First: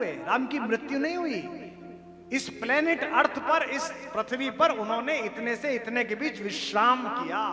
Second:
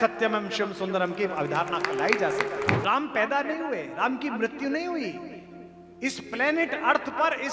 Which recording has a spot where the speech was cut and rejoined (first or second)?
second